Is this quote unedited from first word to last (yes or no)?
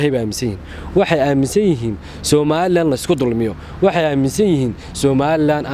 yes